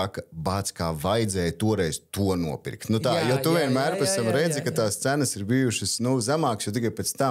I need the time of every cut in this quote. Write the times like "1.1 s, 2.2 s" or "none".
none